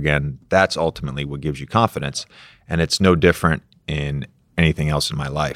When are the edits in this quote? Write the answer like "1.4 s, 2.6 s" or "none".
4.5 s

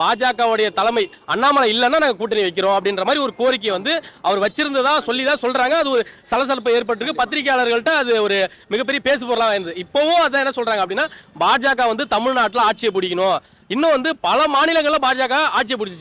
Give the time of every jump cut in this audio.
none

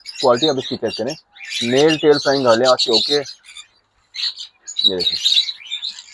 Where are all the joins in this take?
none

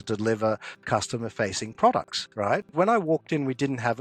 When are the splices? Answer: 2.7 s

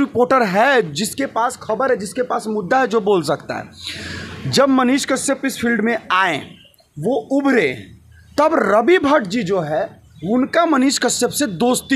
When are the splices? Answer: none

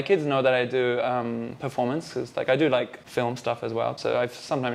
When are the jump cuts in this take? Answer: none

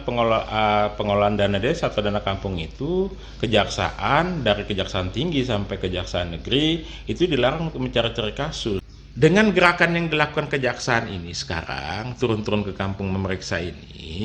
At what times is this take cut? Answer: 8.9 s

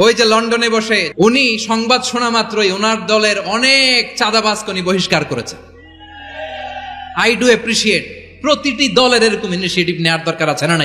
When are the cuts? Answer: 1.1 s

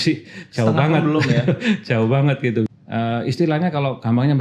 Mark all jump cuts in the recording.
2.7 s

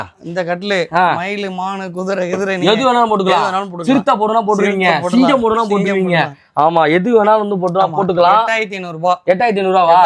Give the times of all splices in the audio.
none

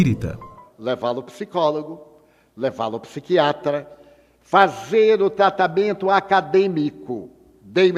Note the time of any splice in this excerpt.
2.6 s

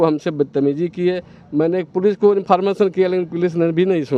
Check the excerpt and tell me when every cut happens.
none

